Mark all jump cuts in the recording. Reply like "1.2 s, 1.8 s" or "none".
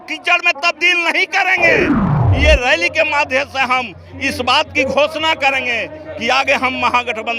2.2 s